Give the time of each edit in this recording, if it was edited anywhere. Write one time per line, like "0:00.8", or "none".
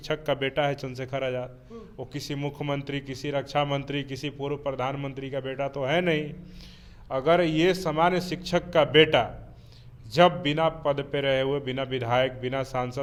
none